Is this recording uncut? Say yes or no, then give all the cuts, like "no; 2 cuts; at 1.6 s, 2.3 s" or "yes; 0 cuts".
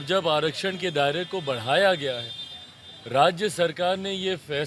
yes; 0 cuts